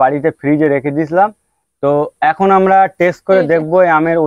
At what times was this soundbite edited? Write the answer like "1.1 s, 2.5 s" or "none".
none